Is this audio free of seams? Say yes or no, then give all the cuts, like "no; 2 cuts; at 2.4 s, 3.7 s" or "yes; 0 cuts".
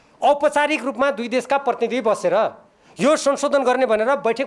yes; 0 cuts